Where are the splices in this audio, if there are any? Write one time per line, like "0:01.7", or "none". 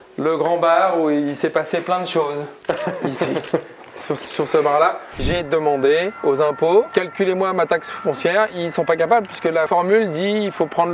0:05.2
0:06.1
0:06.9
0:08.5
0:09.7